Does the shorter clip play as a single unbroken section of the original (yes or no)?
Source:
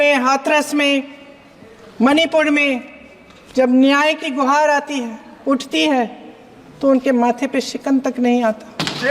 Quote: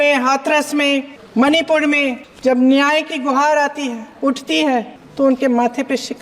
no